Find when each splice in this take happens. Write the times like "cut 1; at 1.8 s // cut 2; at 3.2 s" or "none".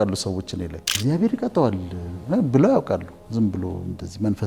cut 1; at 1.0 s